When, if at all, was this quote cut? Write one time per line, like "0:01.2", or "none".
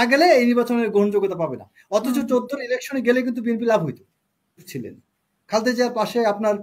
0:04.7